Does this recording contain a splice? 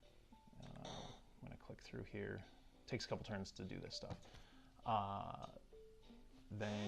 yes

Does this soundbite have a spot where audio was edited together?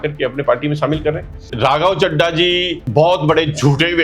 yes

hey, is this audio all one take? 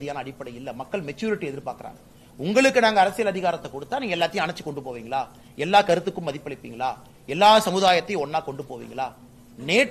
yes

